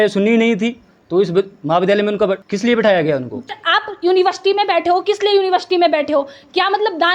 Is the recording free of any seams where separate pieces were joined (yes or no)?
no